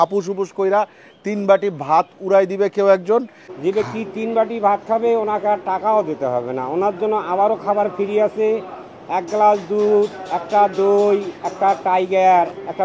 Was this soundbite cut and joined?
yes; 1 cut; at 3.4 s

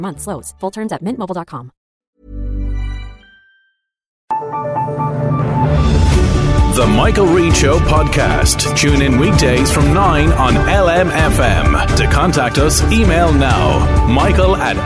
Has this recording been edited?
yes; 1 cut; at 4.2 s

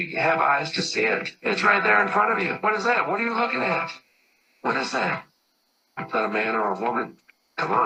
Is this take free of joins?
yes; 0 cuts

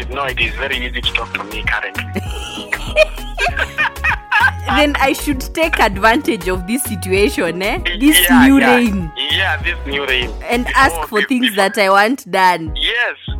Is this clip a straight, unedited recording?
yes; 0 cuts

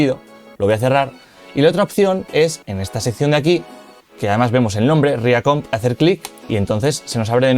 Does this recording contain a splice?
yes; 2 cuts; at 5.7 s, 6.3 s

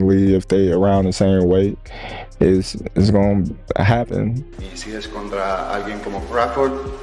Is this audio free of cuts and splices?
yes; 0 cuts

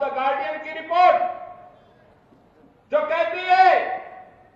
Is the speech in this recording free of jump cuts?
yes; 0 cuts

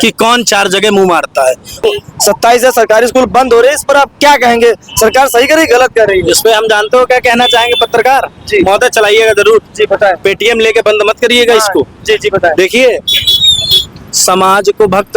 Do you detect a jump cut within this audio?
yes; 1 cut; at 1.8 s

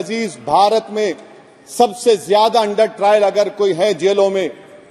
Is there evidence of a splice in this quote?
no; 0 cuts

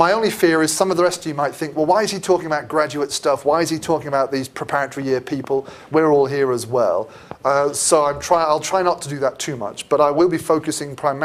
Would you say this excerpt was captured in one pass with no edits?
yes; 0 cuts

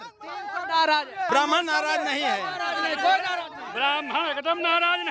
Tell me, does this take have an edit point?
yes; 1 cut; at 1.3 s

